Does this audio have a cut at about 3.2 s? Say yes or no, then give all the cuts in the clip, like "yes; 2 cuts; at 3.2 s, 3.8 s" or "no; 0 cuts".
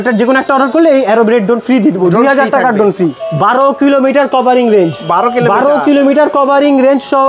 yes; 1 cut; at 3.2 s